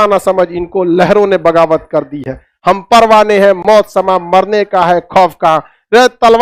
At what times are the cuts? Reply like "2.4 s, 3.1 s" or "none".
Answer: none

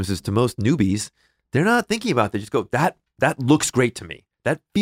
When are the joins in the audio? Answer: none

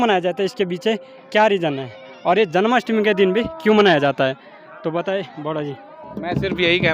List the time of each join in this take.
6.0 s

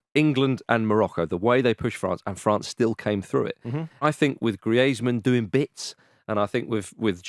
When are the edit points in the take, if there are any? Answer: 4.0 s

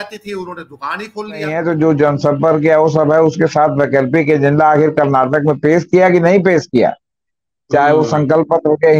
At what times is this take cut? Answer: 1.5 s

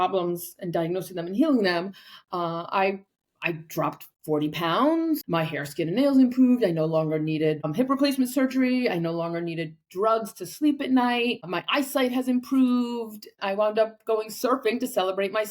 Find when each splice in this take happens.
5.2 s, 7.7 s, 11.5 s, 13.3 s

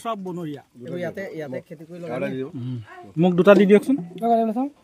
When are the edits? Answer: none

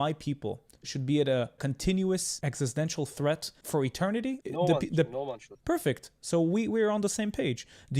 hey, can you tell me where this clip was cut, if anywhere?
1.6 s, 2.3 s, 3.8 s

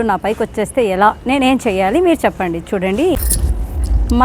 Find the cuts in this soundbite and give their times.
3.2 s

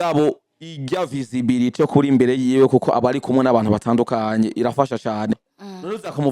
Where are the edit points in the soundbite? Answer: 5.4 s

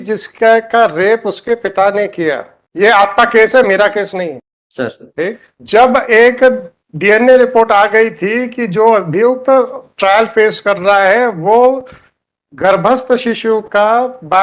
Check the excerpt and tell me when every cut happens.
none

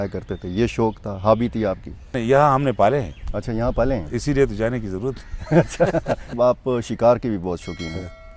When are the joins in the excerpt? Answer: 2.2 s, 6.3 s

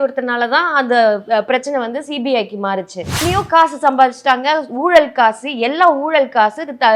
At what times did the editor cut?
3.2 s

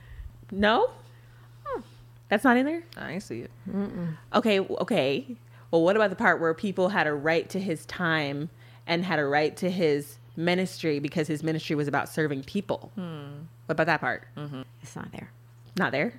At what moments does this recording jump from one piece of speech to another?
14.8 s

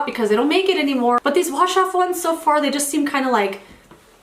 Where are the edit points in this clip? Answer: 1.2 s

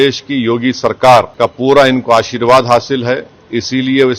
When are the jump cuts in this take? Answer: 1.3 s

